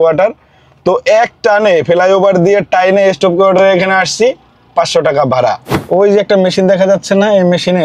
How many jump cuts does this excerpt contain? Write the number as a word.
one